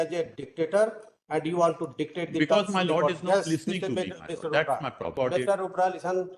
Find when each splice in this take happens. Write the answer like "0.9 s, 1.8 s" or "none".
5.1 s

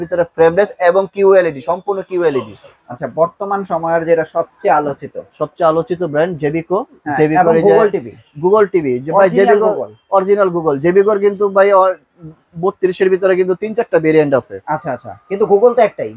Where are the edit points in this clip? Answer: 2.8 s

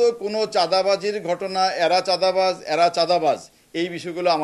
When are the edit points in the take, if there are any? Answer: none

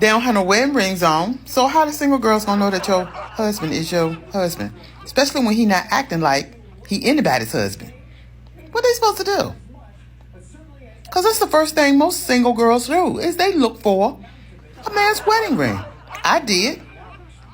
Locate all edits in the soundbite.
1.6 s, 4.9 s, 9.6 s, 15.9 s

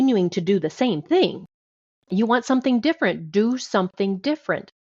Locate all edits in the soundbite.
2.1 s

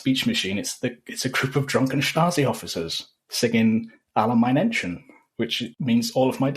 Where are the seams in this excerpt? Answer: 5.7 s

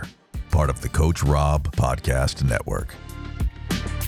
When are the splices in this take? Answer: none

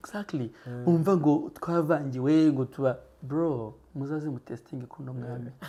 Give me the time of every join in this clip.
none

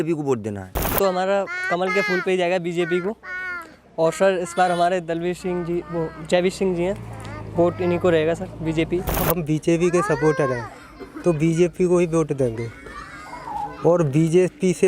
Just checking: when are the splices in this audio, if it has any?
0.9 s, 9.2 s

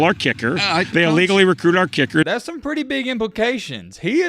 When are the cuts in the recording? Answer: 0.9 s, 2.3 s

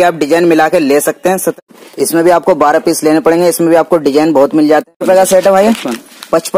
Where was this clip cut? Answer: 1.5 s, 4.9 s

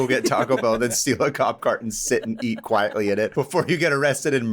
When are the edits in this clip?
3.3 s

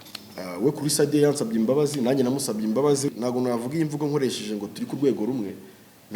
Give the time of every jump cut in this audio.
3.1 s

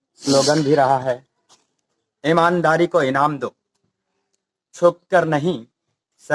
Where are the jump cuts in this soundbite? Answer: none

